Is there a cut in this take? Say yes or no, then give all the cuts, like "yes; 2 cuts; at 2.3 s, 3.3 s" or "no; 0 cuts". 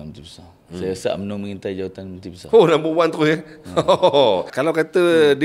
yes; 1 cut; at 4.5 s